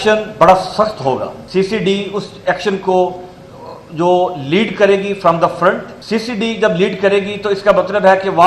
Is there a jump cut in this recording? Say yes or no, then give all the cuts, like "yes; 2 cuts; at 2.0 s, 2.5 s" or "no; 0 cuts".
yes; 2 cuts; at 1.4 s, 5.9 s